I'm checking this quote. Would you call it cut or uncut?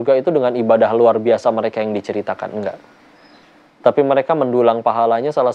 uncut